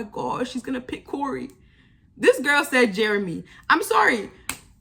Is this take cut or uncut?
uncut